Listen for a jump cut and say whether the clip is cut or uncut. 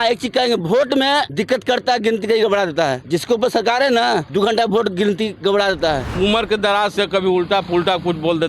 cut